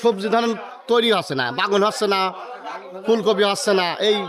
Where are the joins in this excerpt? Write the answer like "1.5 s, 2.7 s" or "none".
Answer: none